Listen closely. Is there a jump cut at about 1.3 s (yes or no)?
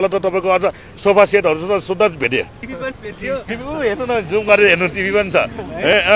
no